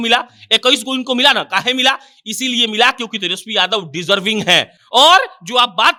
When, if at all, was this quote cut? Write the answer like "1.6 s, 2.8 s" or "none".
none

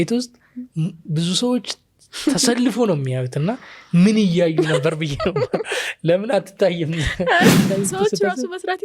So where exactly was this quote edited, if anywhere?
7.7 s

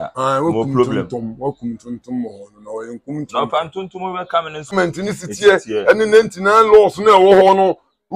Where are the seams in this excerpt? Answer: 4.7 s

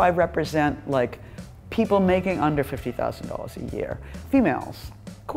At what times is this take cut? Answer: none

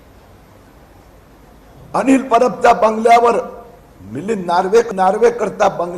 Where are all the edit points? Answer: 4.9 s

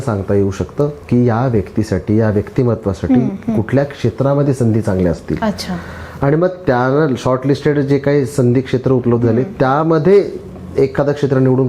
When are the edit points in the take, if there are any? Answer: none

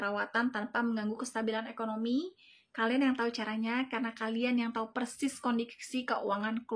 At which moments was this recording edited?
none

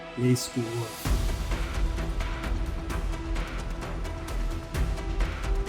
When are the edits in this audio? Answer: 0.9 s

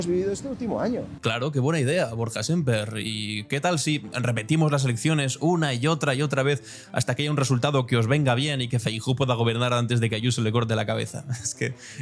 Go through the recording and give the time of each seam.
none

